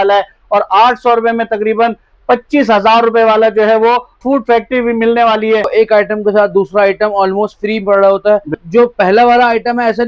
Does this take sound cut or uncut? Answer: cut